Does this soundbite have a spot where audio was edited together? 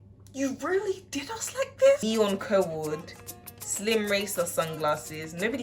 yes; 1 cut; at 2.0 s

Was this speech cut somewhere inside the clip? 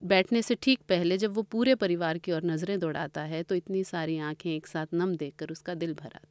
no; 0 cuts

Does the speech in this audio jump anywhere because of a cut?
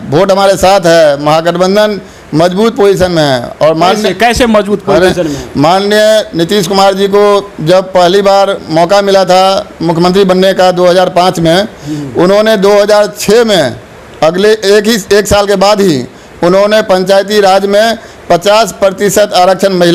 no; 0 cuts

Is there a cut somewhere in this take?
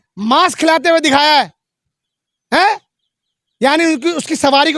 no; 0 cuts

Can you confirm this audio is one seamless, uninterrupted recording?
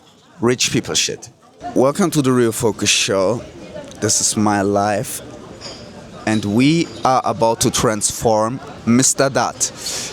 no; 1 cut; at 1.6 s

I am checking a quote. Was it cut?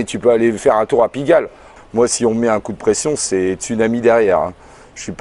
yes; 1 cut; at 1.7 s

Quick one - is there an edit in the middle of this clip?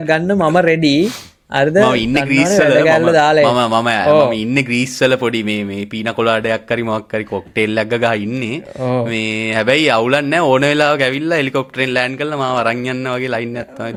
no; 0 cuts

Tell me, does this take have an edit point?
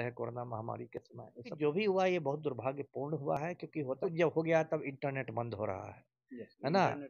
yes; 2 cuts; at 1.5 s, 4.0 s

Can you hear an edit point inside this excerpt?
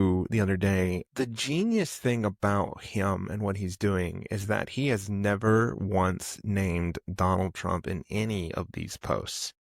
yes; 1 cut; at 1.0 s

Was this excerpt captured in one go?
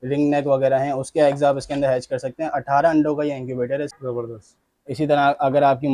no; 1 cut; at 3.9 s

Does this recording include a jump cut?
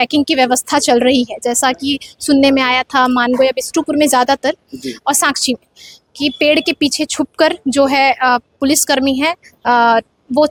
no; 0 cuts

